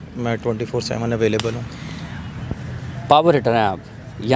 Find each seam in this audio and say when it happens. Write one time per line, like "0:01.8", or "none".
none